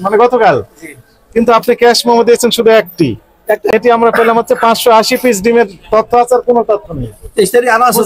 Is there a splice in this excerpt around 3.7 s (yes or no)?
yes